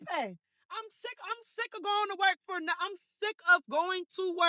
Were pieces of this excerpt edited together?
no; 0 cuts

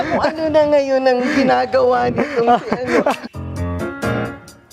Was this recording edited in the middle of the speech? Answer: yes; 1 cut; at 3.3 s

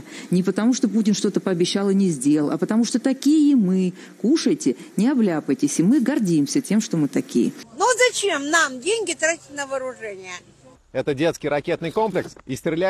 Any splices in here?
yes; 2 cuts; at 7.7 s, 11.1 s

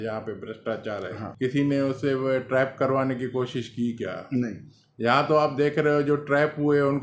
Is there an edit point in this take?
yes; 1 cut; at 1.2 s

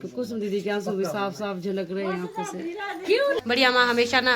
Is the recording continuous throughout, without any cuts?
no; 1 cut; at 3.4 s

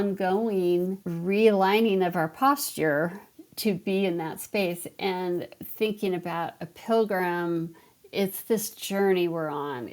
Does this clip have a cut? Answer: yes; 2 cuts; at 1.1 s, 3.3 s

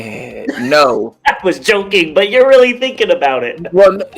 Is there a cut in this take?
no; 0 cuts

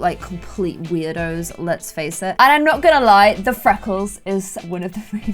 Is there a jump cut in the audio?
yes; 1 cut; at 2.3 s

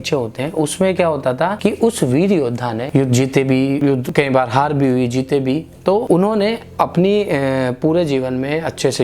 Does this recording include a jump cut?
yes; 4 cuts; at 1.6 s, 2.8 s, 3.9 s, 6.0 s

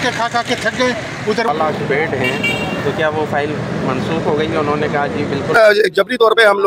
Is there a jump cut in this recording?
yes; 2 cuts; at 1.5 s, 5.6 s

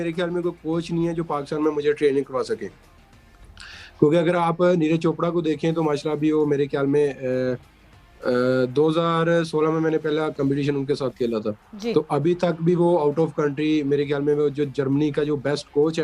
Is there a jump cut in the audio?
no; 0 cuts

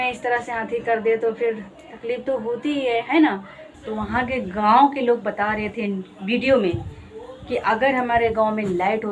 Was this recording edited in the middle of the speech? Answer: yes; 1 cut; at 3.7 s

